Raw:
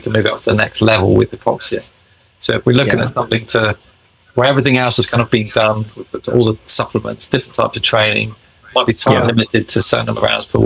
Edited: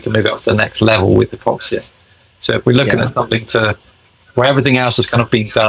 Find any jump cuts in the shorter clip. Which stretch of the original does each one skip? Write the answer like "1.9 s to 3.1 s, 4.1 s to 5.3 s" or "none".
none